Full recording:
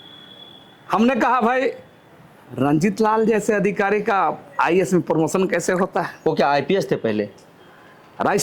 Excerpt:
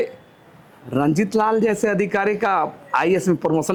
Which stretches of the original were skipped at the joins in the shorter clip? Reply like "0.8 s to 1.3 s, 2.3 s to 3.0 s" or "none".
none